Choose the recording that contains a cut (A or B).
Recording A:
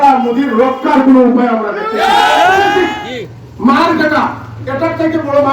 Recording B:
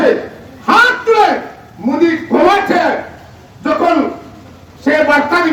A